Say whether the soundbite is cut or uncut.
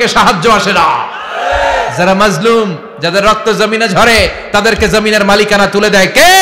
uncut